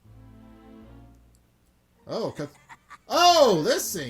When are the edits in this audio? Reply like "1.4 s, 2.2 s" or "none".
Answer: 2.0 s